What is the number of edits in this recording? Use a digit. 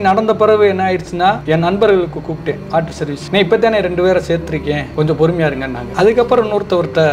0